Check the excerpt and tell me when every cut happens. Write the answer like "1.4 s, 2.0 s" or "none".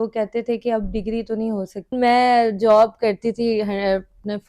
1.9 s